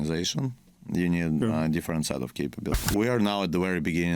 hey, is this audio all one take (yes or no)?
no